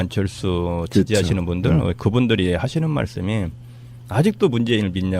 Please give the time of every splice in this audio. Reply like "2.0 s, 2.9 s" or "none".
1.4 s